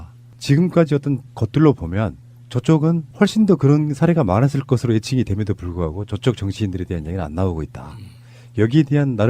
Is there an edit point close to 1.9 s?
no; 1 cut; at 8.2 s

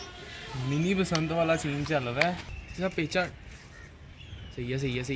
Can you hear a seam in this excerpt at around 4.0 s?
no; 1 cut; at 2.5 s

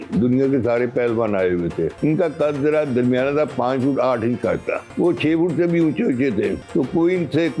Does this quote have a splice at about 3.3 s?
no; 3 cuts; at 1.9 s, 4.8 s, 6.6 s

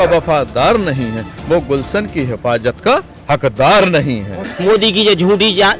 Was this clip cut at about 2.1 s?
no; 1 cut; at 4.5 s

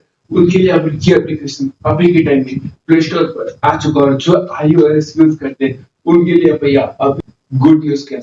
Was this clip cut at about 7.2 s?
yes; 1 cut; at 7.2 s

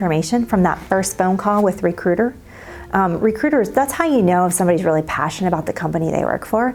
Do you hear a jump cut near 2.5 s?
no; 0 cuts

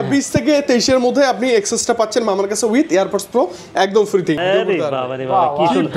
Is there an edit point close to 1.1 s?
no; 1 cut; at 4.4 s

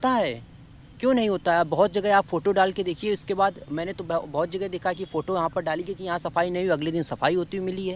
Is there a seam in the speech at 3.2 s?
no; 0 cuts

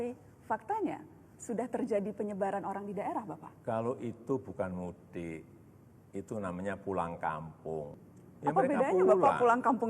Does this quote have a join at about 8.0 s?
yes; 1 cut; at 8.0 s

